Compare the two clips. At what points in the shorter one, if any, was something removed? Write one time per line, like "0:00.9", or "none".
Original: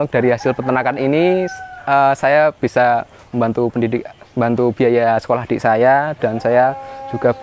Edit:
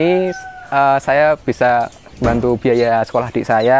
0:02.1